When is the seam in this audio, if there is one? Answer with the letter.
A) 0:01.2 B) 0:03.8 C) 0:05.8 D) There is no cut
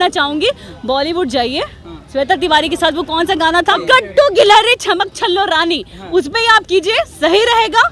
B